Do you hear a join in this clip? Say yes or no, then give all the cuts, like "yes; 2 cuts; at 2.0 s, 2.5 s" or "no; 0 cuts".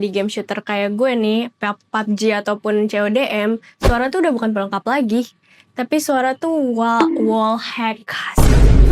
no; 0 cuts